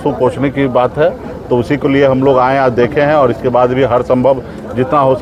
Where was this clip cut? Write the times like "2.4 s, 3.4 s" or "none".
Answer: none